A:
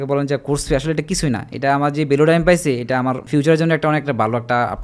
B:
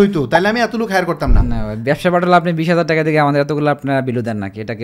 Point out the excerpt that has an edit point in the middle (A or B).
A